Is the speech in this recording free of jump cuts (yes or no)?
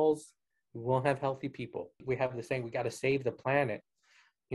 no